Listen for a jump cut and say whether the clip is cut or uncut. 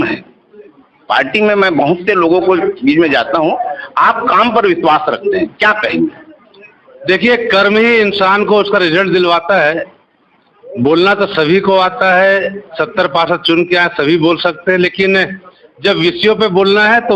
uncut